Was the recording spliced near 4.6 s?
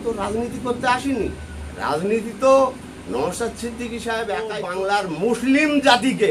yes; 1 cut; at 4.6 s

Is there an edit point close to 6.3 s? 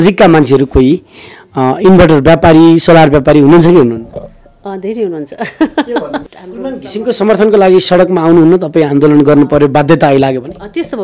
yes; 1 cut; at 6.3 s

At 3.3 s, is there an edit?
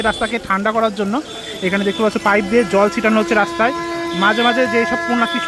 no; 0 cuts

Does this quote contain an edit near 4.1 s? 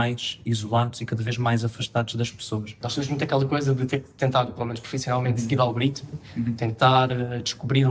no; 1 cut; at 2.8 s

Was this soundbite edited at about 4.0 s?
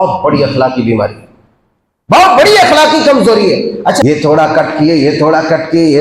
yes; 1 cut; at 4.0 s

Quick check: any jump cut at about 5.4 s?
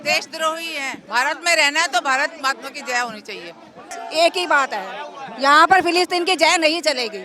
no; 2 cuts; at 1.0 s, 4.0 s

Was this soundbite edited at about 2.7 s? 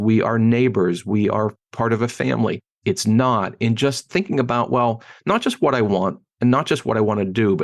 yes; 1 cut; at 2.7 s

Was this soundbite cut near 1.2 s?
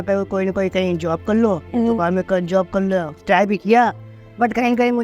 no; 1 cut; at 3.2 s

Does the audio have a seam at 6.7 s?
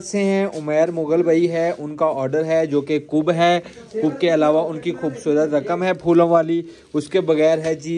no; 0 cuts

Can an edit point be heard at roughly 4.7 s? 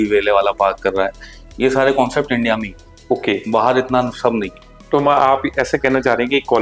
yes; 1 cut; at 4.7 s

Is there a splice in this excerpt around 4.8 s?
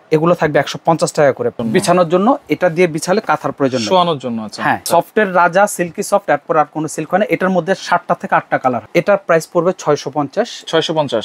yes; 3 cuts; at 1.6 s, 4.8 s, 8.8 s

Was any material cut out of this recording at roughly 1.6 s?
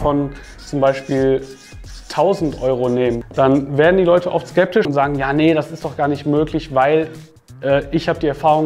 no; 2 cuts; at 3.2 s, 4.9 s

